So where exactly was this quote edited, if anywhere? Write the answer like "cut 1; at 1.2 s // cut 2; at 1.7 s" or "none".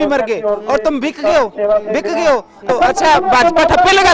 cut 1; at 2.7 s